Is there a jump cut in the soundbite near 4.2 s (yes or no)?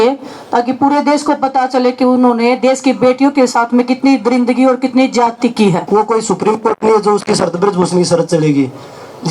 no